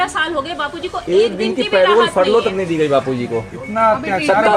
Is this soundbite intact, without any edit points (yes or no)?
yes